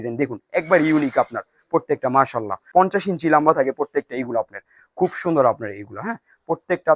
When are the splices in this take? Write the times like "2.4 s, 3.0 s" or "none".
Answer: 2.6 s